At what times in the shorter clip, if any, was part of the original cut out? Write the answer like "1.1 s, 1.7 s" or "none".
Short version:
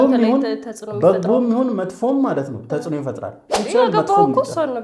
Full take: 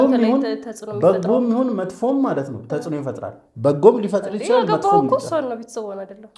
3.5 s